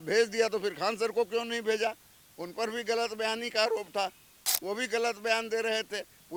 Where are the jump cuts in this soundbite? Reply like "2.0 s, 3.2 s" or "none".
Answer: none